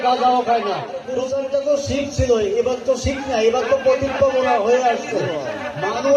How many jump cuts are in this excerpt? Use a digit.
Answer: 1